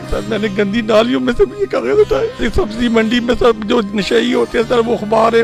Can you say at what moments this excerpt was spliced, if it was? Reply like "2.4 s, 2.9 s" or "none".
2.4 s